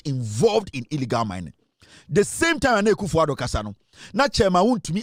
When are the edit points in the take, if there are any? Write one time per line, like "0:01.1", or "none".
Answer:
none